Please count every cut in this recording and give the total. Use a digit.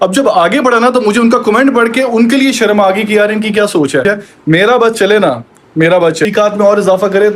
2